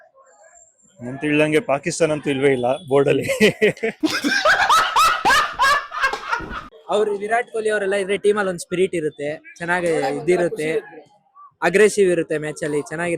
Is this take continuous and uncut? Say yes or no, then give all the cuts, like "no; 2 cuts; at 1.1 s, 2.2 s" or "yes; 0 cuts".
no; 1 cut; at 6.6 s